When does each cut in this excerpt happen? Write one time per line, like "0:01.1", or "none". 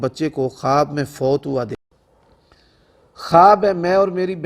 0:01.8

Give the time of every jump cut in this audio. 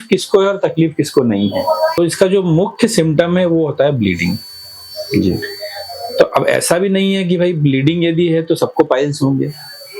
0:02.0

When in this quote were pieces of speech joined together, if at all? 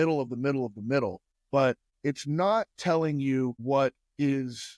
0:01.3
0:01.9
0:03.6

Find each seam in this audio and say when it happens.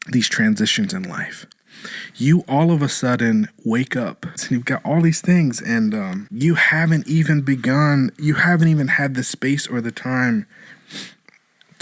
0:04.4
0:06.2

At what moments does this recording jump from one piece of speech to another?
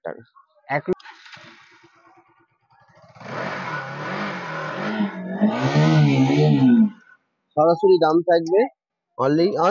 0:00.9

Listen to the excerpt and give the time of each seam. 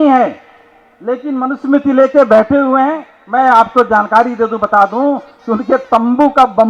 0:03.1

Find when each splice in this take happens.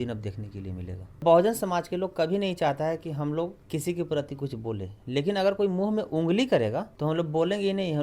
0:01.2
0:03.6
0:06.9

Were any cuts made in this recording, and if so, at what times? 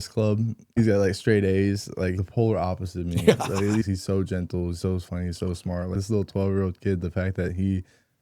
0:00.7
0:02.2
0:03.8
0:05.9

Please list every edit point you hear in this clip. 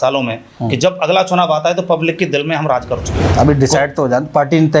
0:03.2

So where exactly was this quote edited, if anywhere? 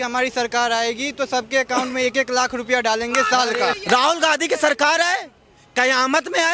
0:03.7

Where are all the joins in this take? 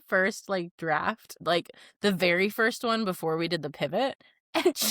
0:01.3

